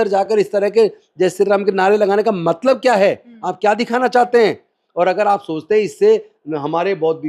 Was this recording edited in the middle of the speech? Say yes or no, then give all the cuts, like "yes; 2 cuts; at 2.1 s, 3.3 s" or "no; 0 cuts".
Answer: no; 0 cuts